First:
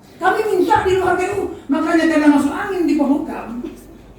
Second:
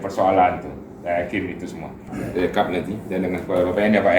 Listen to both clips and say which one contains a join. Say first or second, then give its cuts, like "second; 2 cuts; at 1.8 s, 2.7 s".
second; 1 cut; at 2.1 s